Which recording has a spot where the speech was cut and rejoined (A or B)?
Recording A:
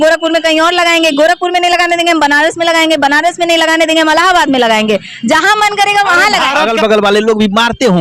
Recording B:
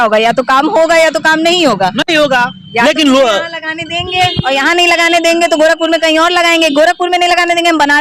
A